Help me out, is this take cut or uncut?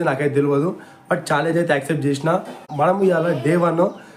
cut